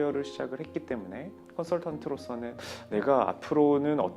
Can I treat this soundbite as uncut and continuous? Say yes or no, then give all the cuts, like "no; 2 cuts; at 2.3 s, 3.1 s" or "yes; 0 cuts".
yes; 0 cuts